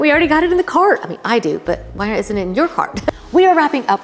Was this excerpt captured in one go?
no; 1 cut; at 3.1 s

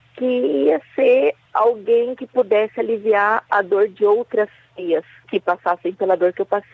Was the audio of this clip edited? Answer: no; 0 cuts

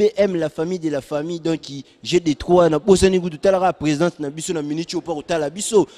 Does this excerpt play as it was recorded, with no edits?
yes; 0 cuts

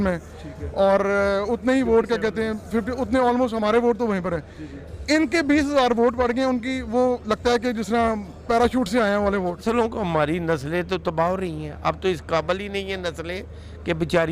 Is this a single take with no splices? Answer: no; 1 cut; at 9.6 s

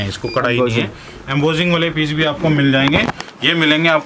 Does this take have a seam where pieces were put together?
no; 0 cuts

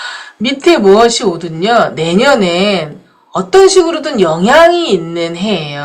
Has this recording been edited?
no; 0 cuts

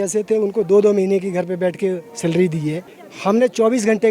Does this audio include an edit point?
yes; 1 cut; at 2.8 s

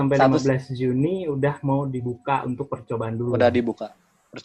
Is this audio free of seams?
yes; 0 cuts

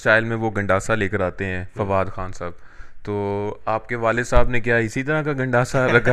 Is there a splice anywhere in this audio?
no; 0 cuts

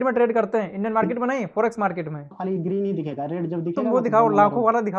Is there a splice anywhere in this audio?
yes; 1 cut; at 2.3 s

